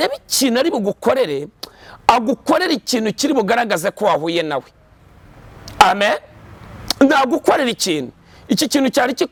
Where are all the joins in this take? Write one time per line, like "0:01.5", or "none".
none